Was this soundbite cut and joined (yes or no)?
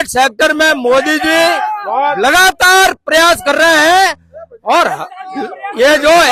no